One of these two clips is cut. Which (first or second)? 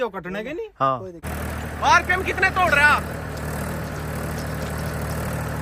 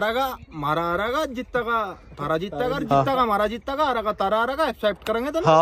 first